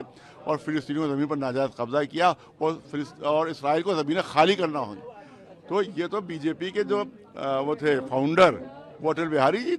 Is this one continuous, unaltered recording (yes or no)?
yes